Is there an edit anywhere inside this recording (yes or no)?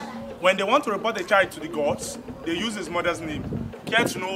no